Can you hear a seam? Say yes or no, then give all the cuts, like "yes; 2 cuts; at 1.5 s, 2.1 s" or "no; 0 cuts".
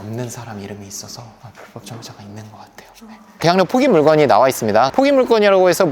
yes; 1 cut; at 3.4 s